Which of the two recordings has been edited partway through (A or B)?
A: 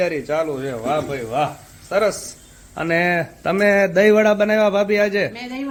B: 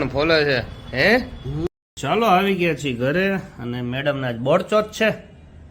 B